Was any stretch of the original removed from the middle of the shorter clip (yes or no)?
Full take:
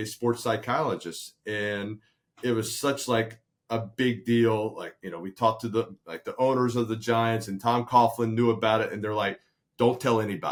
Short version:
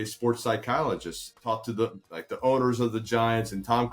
yes